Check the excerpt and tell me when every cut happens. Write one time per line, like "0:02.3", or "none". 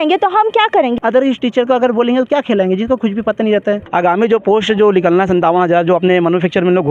0:00.9
0:03.8